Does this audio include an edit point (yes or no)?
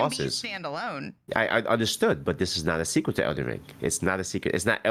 no